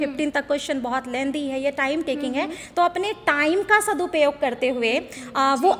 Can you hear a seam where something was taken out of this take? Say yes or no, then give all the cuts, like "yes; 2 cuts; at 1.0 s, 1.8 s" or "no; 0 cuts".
no; 0 cuts